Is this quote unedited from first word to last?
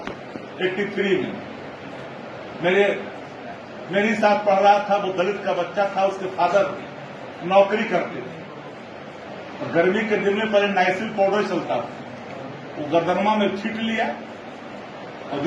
yes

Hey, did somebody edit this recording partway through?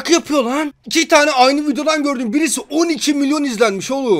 no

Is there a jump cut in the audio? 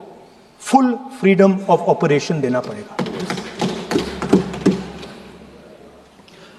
no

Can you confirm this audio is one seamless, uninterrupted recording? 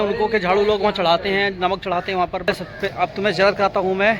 no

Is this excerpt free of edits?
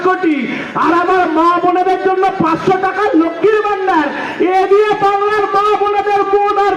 yes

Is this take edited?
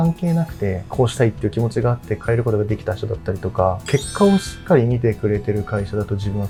no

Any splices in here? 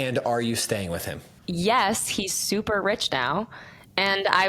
no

